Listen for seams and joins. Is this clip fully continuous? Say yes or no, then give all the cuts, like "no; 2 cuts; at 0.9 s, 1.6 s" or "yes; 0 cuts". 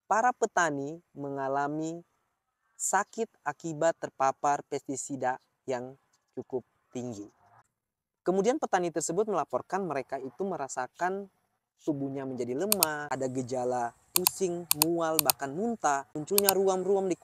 yes; 0 cuts